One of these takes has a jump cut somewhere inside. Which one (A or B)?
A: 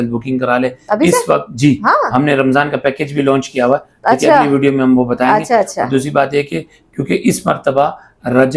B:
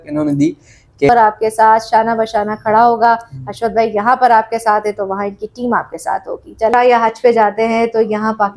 B